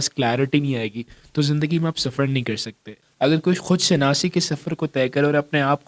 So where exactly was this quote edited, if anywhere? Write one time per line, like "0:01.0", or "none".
0:03.0

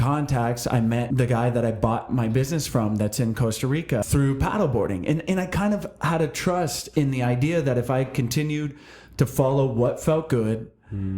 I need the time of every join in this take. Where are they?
0:01.1
0:04.1

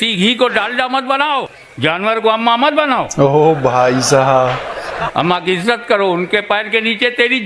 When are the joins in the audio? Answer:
0:01.6
0:05.1

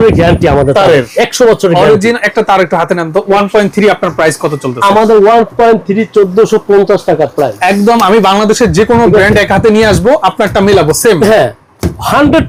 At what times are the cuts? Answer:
none

